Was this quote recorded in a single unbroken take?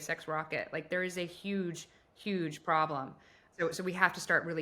no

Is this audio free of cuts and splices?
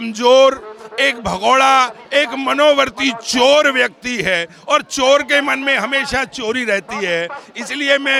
yes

